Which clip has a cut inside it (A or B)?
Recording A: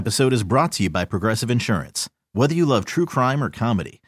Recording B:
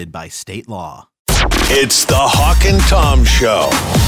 B